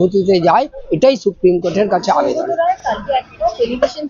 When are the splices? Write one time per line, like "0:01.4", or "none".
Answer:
none